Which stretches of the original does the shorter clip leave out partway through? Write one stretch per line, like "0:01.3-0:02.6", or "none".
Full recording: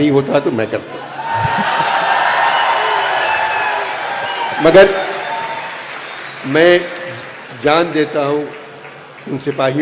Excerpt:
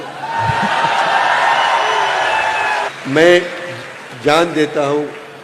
0:03.9-0:06.3